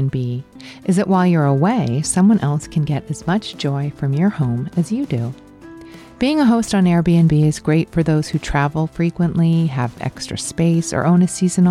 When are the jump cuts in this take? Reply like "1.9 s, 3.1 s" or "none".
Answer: none